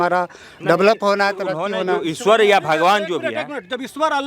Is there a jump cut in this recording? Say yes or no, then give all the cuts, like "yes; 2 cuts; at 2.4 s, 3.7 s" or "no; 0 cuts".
no; 0 cuts